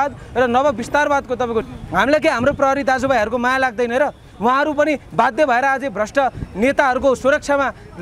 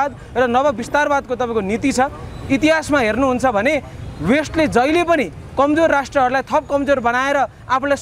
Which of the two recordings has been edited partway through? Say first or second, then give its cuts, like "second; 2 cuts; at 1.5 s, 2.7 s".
first; 1 cut; at 1.7 s